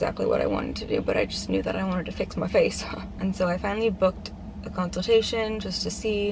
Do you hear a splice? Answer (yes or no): no